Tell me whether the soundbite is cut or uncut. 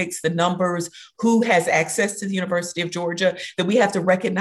uncut